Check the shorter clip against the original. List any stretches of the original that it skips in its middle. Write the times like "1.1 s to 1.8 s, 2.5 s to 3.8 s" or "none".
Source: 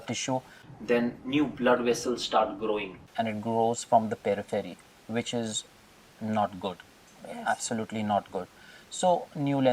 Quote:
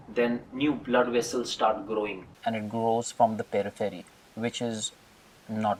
none